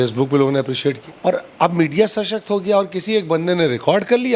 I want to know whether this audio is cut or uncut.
cut